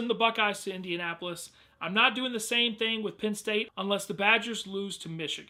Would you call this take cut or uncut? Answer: uncut